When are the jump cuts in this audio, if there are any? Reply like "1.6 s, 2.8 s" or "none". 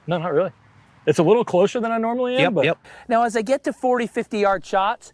2.9 s